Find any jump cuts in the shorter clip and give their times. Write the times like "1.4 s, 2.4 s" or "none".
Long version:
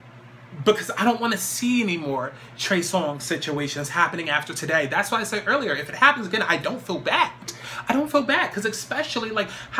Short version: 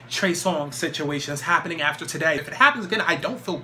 2.4 s